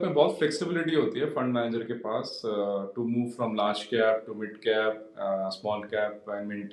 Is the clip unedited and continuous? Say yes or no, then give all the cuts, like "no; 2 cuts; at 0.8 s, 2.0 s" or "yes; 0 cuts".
yes; 0 cuts